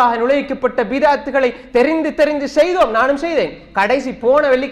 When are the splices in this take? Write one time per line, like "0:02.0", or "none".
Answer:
none